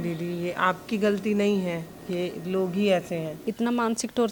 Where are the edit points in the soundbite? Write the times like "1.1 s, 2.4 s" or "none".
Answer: 3.4 s